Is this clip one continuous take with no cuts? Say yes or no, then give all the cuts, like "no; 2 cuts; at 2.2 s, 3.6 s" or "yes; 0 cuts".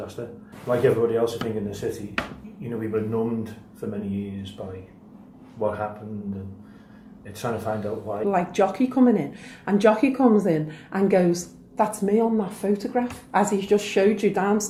yes; 0 cuts